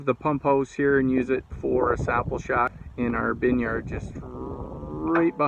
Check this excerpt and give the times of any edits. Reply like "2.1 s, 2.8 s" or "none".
2.8 s